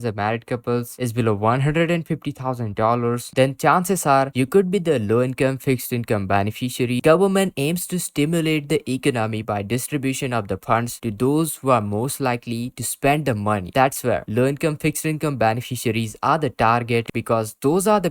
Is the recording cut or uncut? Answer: cut